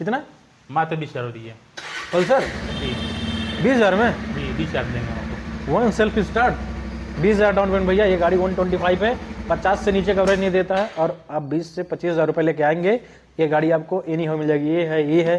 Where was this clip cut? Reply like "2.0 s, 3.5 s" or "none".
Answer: none